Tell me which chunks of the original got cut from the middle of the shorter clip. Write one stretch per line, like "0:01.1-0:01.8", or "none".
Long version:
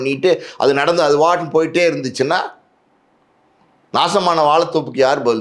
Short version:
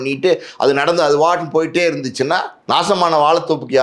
0:02.5-0:03.8